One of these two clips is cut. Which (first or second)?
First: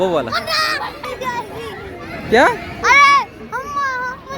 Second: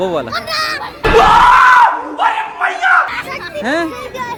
first